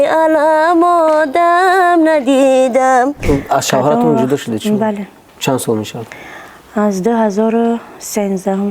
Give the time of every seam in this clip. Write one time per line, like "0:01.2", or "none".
0:03.2